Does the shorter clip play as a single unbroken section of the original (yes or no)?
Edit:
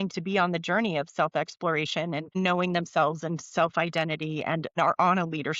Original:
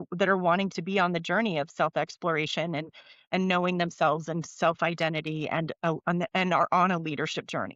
no